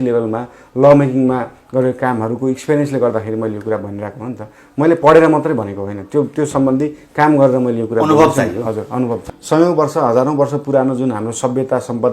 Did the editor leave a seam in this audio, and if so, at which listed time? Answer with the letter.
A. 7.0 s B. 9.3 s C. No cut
B